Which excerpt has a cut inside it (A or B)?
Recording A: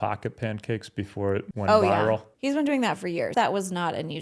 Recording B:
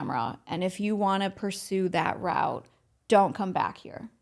A